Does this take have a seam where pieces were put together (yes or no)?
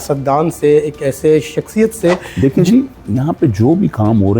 yes